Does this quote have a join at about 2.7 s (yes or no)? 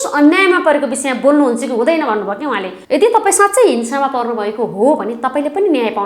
yes